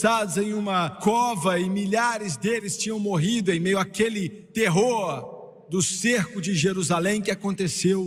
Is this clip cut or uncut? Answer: uncut